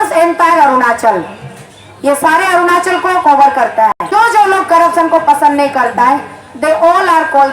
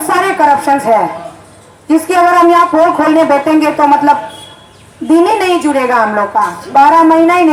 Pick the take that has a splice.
first; 1 cut; at 4.0 s

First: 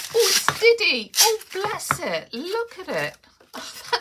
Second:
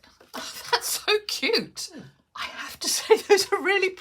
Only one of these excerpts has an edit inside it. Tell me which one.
second; 1 cut; at 1.8 s

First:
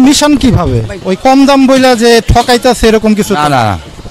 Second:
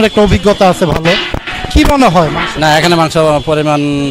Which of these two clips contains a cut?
first; 1 cut; at 0.9 s

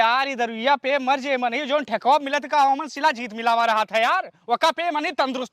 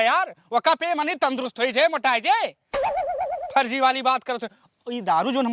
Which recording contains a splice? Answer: second; 2 cuts; at 2.5 s, 3.5 s

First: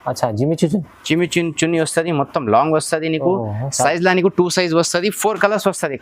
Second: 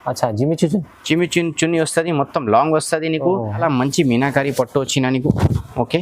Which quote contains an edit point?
second; 1 cut; at 3.6 s

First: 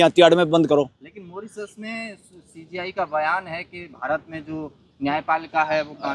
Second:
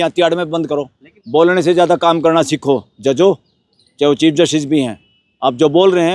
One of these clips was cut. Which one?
second; 1 cut; at 1.1 s

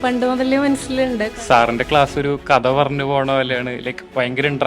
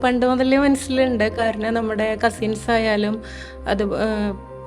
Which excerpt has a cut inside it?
first; 1 cut; at 1.3 s

